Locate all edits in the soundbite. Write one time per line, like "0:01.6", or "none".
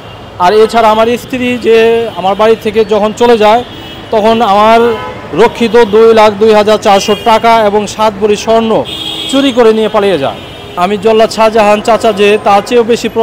0:10.6

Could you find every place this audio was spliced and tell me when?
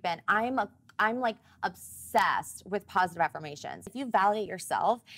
0:03.9

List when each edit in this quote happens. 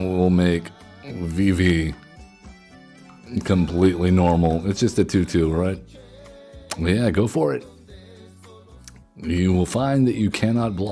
0:08.8

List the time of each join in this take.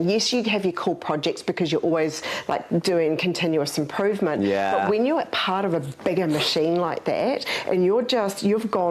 none

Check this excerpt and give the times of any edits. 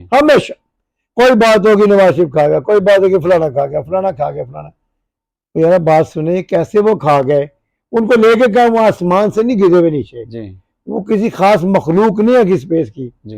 none

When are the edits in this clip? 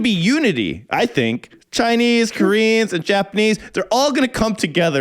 0:01.6

